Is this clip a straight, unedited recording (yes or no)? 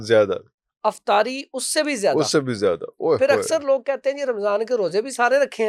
yes